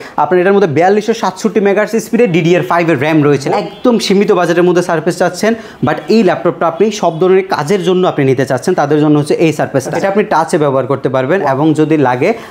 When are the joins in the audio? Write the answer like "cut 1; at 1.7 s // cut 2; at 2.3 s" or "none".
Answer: cut 1; at 3.5 s // cut 2; at 9.9 s